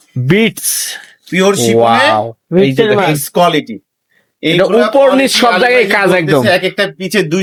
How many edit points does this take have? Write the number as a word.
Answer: zero